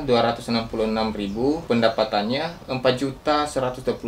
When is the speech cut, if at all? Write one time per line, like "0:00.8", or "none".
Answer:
0:01.6